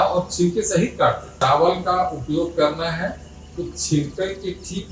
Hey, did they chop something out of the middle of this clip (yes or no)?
yes